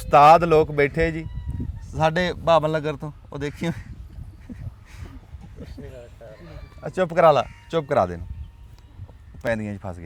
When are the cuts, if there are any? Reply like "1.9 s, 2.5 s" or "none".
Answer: none